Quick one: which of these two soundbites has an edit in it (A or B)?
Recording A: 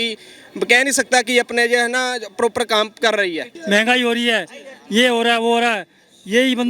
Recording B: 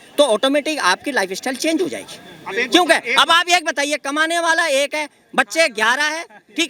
A